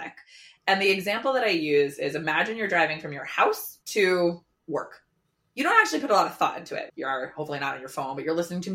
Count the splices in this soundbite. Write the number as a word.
two